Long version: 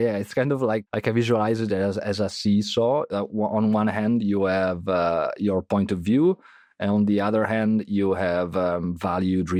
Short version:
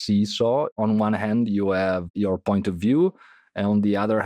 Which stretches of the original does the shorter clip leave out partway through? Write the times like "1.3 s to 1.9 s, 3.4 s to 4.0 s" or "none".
3.1 s to 3.5 s, 4.8 s to 5.3 s